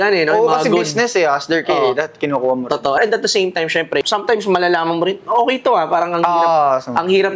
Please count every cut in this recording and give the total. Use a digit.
0